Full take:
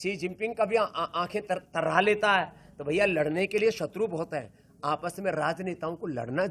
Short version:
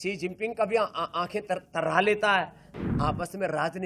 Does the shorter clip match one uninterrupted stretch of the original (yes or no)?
no